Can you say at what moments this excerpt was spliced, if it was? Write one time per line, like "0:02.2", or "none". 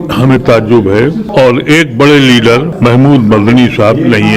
0:01.3
0:02.7